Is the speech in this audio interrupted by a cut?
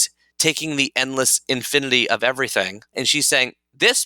yes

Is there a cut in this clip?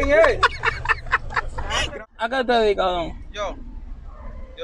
yes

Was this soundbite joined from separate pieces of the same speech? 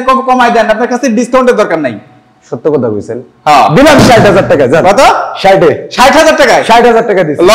no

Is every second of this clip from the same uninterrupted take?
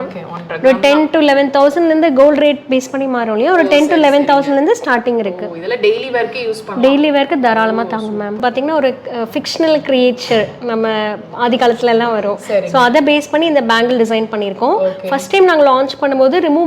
no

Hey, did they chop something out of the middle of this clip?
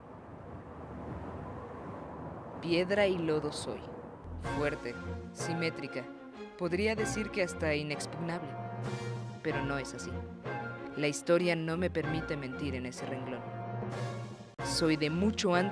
yes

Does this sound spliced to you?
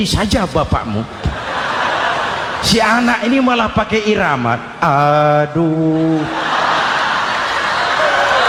no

